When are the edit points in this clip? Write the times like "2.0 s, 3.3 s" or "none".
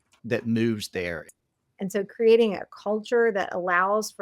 1.2 s